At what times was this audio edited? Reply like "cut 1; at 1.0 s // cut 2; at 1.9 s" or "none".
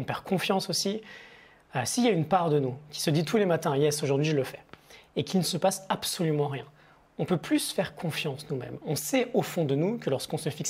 none